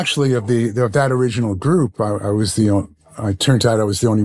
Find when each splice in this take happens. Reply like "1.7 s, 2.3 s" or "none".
none